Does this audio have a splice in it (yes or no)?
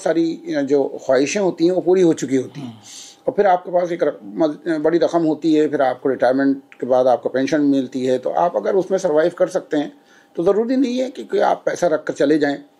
no